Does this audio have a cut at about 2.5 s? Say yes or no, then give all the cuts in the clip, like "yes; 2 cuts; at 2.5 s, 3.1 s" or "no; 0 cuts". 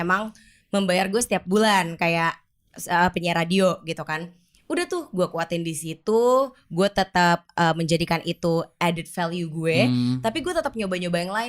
no; 0 cuts